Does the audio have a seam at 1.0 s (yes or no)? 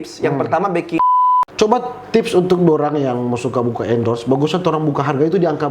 yes